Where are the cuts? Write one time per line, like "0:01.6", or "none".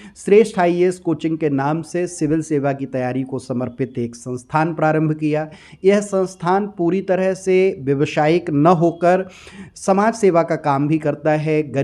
none